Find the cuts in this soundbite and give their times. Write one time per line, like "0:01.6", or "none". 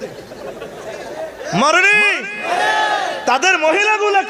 none